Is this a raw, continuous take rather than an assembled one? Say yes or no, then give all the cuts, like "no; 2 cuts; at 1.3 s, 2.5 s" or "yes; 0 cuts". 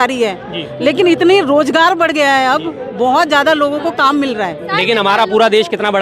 no; 1 cut; at 4.7 s